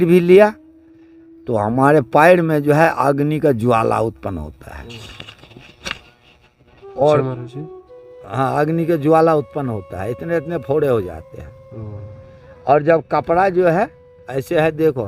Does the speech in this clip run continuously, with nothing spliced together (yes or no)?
yes